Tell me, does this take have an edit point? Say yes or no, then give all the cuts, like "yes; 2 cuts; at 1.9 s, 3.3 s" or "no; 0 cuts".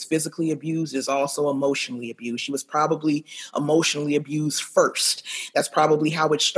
no; 0 cuts